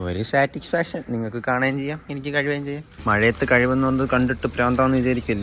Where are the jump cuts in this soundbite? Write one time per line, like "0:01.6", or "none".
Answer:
0:02.9